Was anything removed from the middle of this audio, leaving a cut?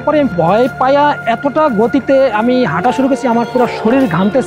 no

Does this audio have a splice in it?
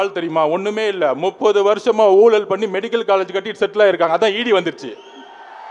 no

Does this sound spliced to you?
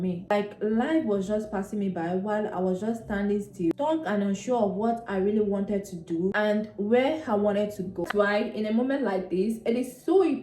yes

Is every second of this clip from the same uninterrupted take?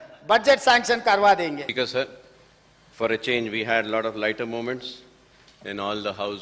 no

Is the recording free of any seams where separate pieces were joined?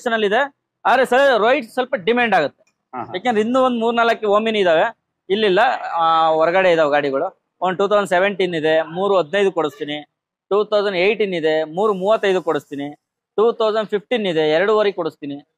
yes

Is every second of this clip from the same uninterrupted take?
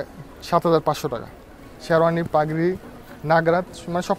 no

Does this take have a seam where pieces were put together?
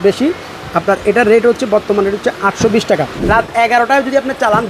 yes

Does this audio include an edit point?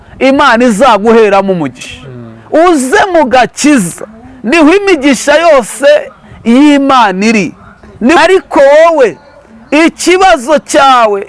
yes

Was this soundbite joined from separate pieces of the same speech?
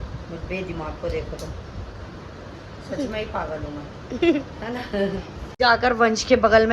yes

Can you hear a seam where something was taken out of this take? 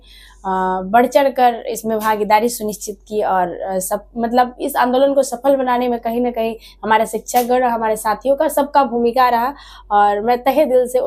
no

